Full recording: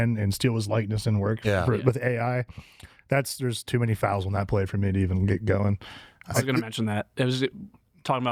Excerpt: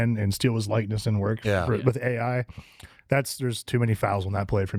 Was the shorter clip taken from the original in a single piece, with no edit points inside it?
yes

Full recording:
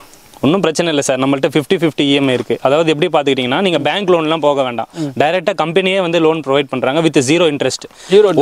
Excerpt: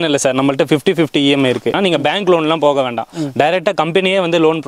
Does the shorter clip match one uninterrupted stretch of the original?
no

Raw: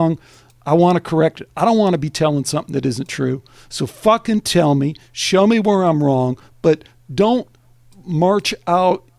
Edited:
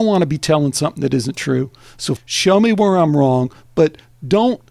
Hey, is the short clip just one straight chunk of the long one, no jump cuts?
no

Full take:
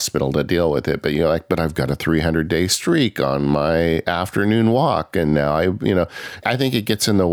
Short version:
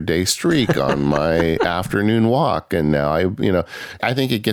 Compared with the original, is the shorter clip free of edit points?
yes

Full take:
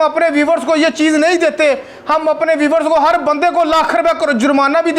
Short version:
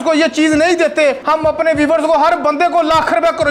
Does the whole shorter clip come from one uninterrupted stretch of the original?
no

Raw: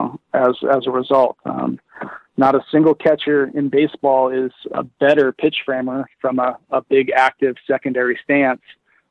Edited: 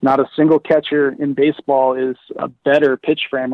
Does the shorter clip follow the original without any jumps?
yes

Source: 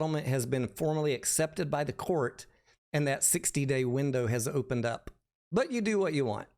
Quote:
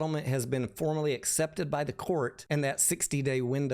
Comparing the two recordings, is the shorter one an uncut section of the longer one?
no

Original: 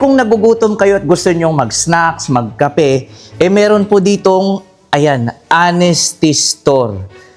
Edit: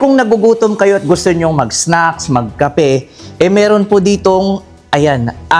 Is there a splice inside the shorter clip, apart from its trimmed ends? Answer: no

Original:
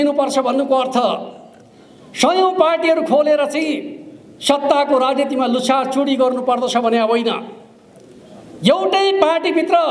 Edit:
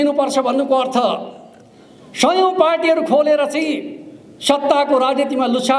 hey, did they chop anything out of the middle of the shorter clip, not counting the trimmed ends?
no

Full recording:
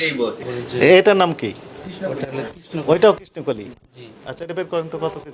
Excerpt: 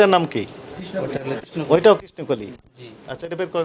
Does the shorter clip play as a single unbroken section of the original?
no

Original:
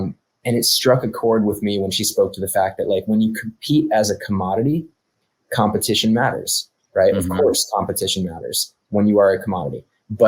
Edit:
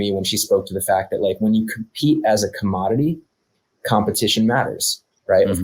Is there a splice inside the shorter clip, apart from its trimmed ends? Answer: no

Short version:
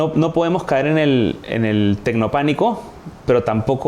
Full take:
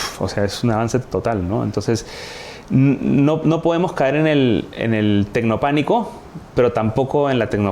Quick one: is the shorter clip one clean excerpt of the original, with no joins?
yes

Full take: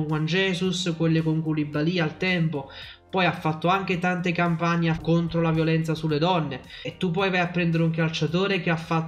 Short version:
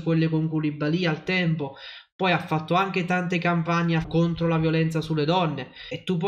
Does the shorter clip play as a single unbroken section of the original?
yes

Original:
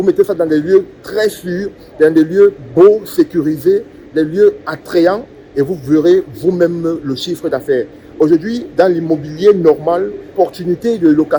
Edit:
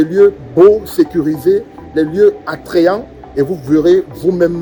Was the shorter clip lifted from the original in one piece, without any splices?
yes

